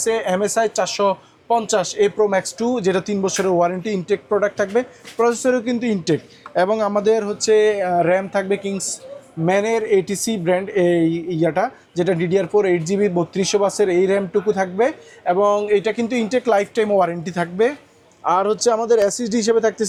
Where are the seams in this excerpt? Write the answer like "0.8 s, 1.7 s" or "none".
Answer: none